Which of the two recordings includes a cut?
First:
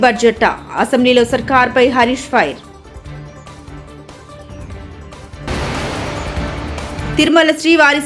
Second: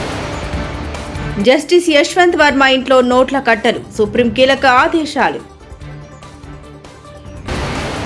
second; 1 cut; at 1.2 s

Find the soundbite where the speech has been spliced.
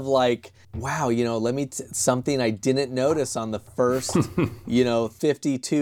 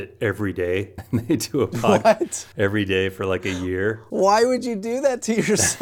second; 3 cuts; at 1.0 s, 2.4 s, 4.0 s

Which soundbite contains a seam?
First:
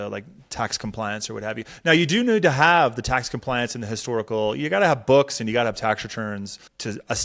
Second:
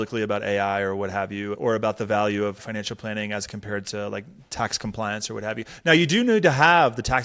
second; 2 cuts; at 1.5 s, 2.6 s

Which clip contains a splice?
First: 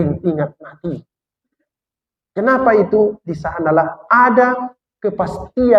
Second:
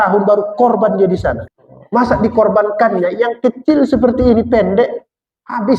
second; 1 cut; at 1.5 s

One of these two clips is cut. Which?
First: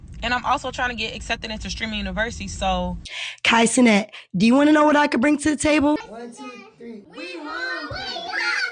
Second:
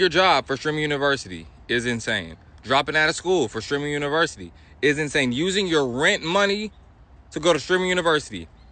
first; 2 cuts; at 3.3 s, 6.1 s

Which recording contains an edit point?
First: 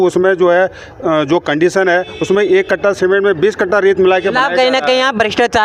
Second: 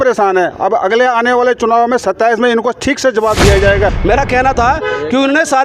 second; 1 cut; at 4.0 s

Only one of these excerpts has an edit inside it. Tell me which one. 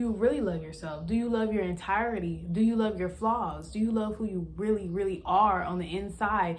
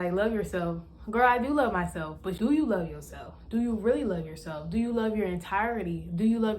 second; 1 cut; at 2.3 s

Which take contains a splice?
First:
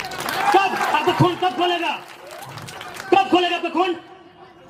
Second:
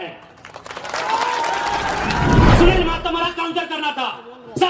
second; 1 cut; at 2.5 s

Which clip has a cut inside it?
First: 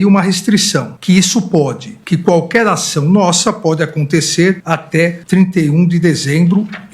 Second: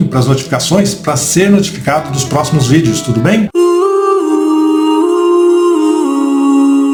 first; 2 cuts; at 0.9 s, 4.9 s

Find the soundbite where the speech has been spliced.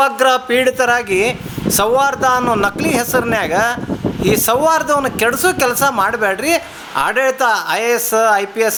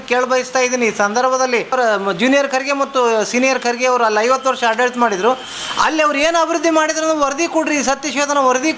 second; 1 cut; at 1.7 s

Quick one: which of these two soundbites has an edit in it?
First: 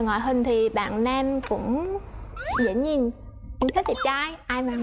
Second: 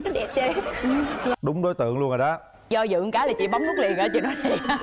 second; 1 cut; at 1.3 s

